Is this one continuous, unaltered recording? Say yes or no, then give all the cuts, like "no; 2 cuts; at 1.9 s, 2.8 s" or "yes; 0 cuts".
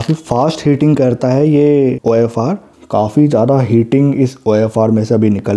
no; 1 cut; at 2.7 s